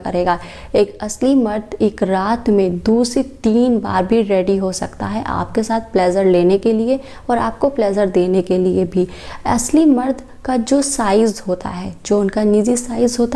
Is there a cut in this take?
no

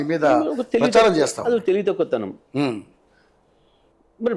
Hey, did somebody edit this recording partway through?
no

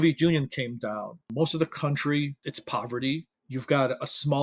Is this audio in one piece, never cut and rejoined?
no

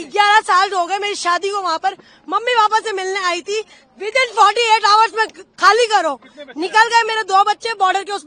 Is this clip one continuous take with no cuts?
yes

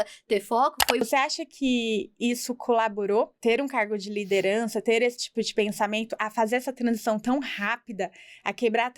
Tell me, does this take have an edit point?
yes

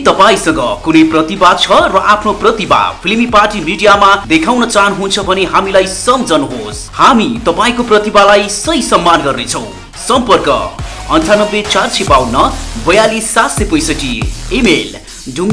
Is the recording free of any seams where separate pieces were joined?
yes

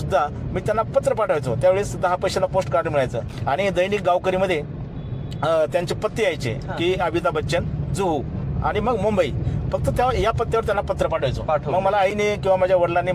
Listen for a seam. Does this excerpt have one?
no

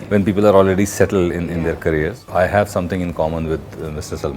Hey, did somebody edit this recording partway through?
yes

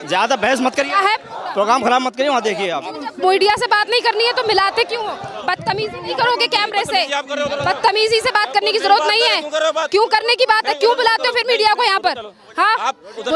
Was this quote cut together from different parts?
no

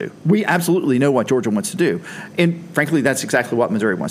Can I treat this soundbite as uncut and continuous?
yes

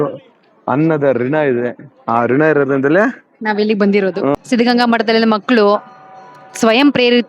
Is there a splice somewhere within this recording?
yes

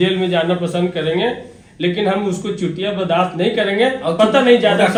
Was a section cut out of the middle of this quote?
no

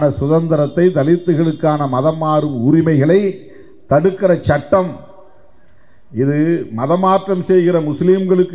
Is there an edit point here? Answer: no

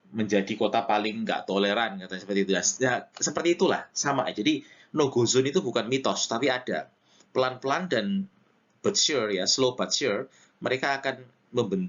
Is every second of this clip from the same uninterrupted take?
yes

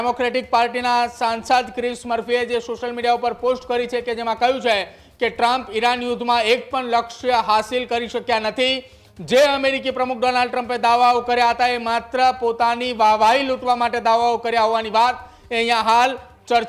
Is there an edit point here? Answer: no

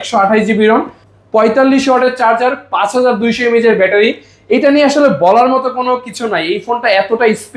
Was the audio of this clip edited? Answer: yes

